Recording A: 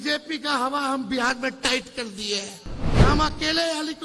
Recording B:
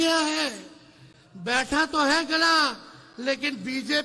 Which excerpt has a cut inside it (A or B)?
A